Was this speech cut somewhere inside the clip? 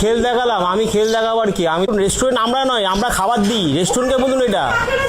yes; 1 cut; at 1.9 s

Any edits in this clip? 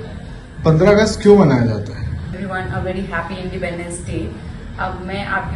no; 0 cuts

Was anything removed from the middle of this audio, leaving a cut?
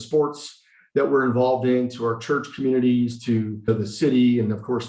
yes; 1 cut; at 3.7 s

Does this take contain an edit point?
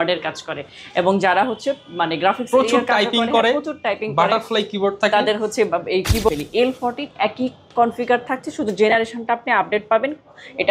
yes; 1 cut; at 6.3 s

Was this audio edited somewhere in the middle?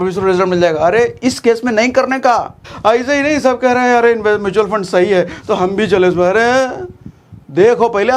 yes; 1 cut; at 2.6 s

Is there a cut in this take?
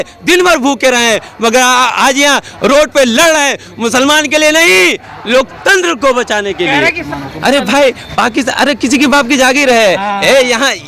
yes; 1 cut; at 7.0 s

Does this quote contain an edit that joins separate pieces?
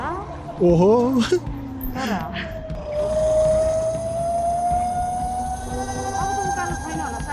yes; 1 cut; at 2.7 s

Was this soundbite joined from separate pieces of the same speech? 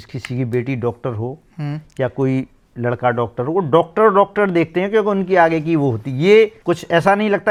no; 0 cuts

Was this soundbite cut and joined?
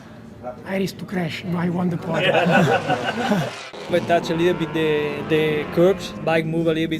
yes; 2 cuts; at 3.9 s, 6.1 s

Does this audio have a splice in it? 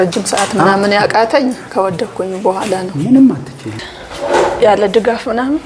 yes; 1 cut; at 3.8 s

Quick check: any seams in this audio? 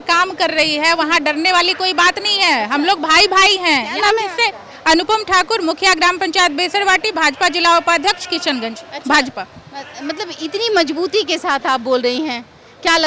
no; 0 cuts

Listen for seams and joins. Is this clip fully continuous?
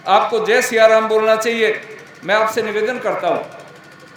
yes; 0 cuts

